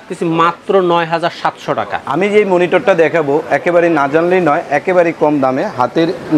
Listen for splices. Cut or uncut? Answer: cut